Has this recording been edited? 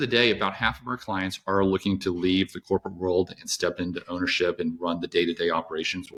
no; 0 cuts

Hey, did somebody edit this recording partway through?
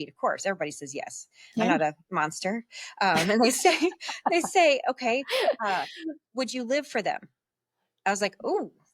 no; 0 cuts

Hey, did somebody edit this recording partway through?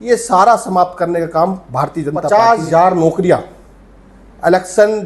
yes; 1 cut; at 2.2 s

